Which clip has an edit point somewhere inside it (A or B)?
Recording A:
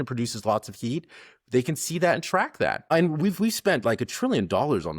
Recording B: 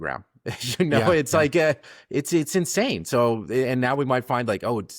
A